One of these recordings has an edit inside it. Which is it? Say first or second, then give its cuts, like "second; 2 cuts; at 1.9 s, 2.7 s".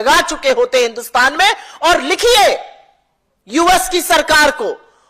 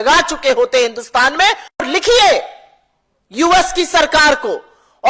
second; 1 cut; at 1.8 s